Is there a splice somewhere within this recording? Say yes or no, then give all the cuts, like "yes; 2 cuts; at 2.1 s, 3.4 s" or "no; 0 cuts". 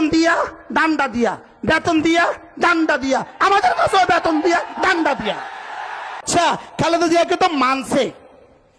yes; 1 cut; at 6.2 s